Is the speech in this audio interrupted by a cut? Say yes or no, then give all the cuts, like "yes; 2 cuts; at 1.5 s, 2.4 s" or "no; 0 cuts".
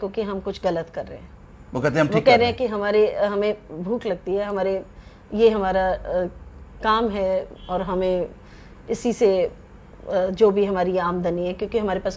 no; 0 cuts